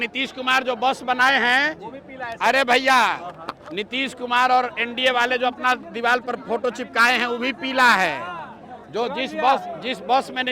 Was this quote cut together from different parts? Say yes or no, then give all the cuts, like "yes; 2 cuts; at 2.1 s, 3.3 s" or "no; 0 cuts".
no; 0 cuts